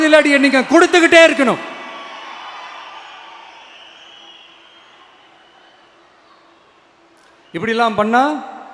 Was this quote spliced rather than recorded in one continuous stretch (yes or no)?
no